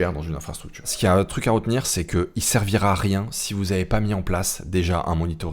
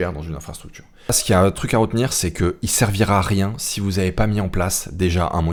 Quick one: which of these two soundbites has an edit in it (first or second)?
first